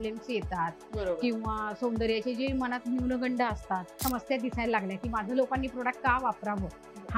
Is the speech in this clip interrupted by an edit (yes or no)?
yes